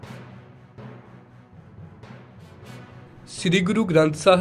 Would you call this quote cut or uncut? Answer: uncut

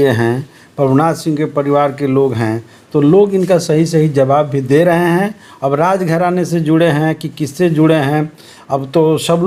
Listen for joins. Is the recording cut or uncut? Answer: uncut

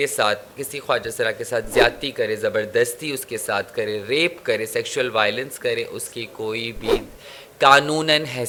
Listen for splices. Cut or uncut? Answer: uncut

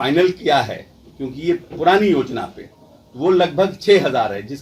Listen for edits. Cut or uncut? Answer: uncut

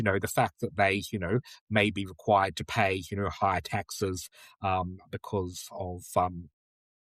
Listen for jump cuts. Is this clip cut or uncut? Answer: uncut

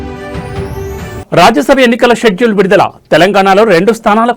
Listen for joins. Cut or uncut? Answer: cut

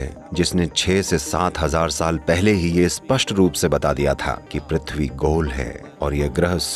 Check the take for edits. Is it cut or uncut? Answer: uncut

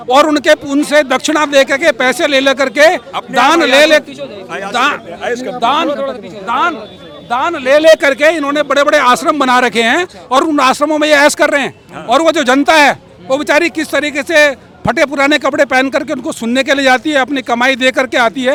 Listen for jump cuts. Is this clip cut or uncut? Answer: uncut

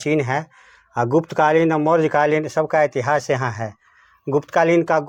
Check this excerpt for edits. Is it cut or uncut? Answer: uncut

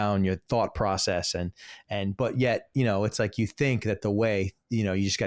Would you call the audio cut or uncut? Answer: uncut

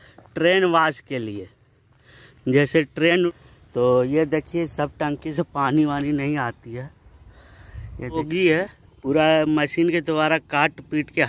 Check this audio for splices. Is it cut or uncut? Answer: cut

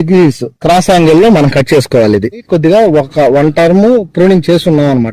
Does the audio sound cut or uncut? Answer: cut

